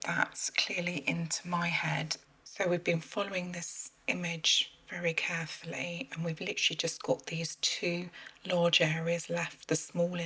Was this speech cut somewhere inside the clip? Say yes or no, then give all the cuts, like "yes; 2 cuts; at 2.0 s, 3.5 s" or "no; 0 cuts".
yes; 1 cut; at 2.2 s